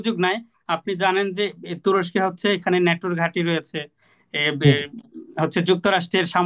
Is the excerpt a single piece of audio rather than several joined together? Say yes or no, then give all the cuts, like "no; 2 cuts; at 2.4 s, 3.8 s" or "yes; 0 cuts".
yes; 0 cuts